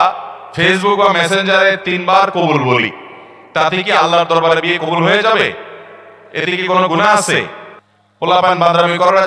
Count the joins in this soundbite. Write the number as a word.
zero